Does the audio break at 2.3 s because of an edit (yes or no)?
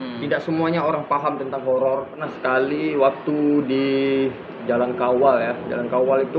yes